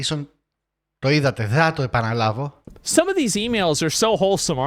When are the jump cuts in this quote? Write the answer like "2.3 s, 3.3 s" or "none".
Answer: 2.8 s